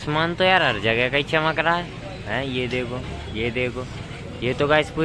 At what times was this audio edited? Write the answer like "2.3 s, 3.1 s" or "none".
none